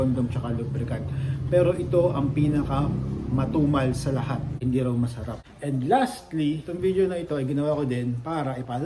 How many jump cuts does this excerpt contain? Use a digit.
3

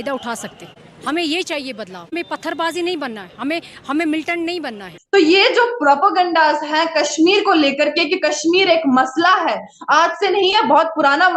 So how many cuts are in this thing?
1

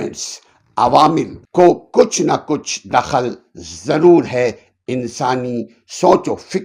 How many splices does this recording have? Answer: 1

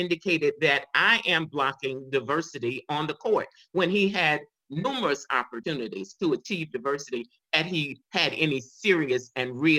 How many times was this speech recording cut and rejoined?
1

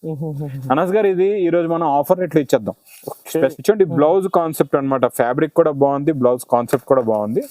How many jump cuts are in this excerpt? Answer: 1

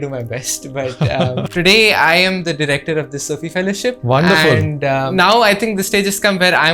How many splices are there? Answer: 3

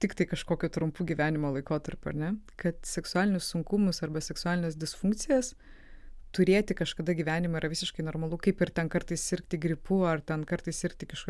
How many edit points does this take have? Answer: 0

